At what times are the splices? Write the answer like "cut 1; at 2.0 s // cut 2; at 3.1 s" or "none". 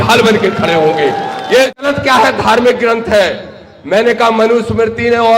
cut 1; at 1.8 s